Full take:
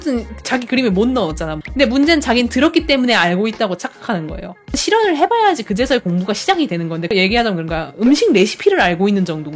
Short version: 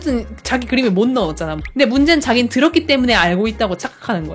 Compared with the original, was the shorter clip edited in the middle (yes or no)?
no